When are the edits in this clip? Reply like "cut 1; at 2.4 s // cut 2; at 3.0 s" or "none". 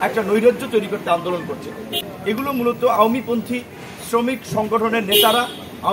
cut 1; at 2.0 s

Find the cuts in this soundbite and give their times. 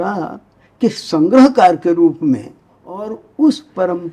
cut 1; at 3.2 s

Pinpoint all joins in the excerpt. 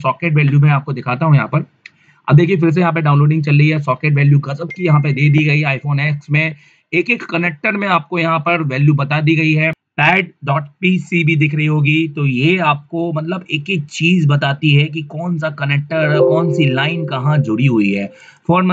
cut 1; at 9.8 s

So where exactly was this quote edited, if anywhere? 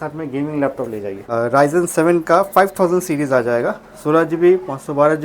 cut 1; at 1.3 s

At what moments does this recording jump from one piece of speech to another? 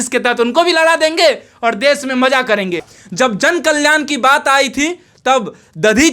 cut 1; at 2.9 s

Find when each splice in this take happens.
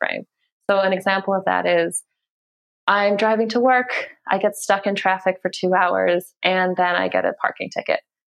none

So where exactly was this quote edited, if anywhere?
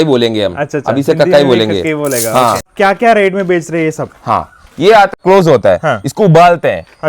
cut 1; at 2.7 s // cut 2; at 5.1 s

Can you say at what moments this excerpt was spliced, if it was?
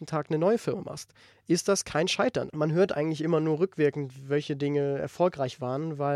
cut 1; at 2.5 s

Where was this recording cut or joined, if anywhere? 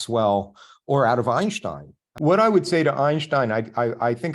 cut 1; at 2.0 s

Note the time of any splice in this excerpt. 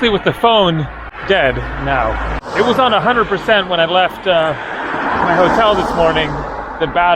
cut 1; at 1.1 s // cut 2; at 2.5 s

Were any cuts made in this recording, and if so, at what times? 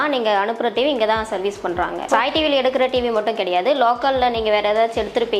none

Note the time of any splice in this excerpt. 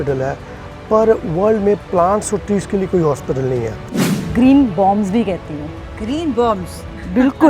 cut 1; at 4.1 s

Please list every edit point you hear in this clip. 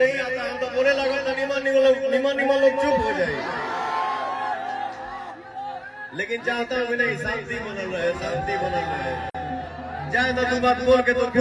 none

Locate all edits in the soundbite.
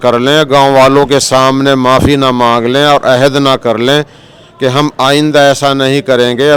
none

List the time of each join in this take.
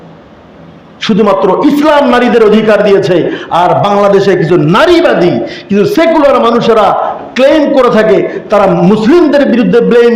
none

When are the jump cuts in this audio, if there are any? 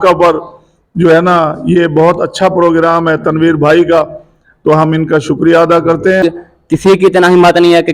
cut 1; at 6.2 s

